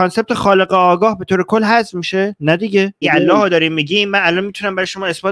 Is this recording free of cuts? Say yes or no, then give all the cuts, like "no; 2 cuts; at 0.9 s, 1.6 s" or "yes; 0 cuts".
no; 1 cut; at 3.0 s